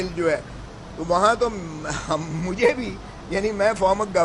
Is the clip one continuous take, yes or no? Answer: yes